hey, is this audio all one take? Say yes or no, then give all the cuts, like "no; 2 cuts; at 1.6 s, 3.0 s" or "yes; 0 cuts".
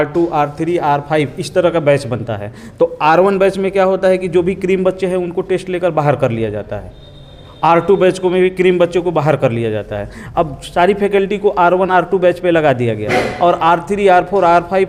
yes; 0 cuts